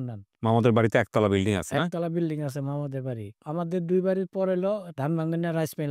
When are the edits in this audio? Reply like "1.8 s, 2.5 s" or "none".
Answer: 3.5 s, 4.9 s